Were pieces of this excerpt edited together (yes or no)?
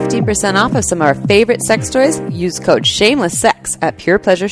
no